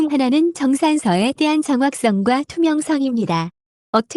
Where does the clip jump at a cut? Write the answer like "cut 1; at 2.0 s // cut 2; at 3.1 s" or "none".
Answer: none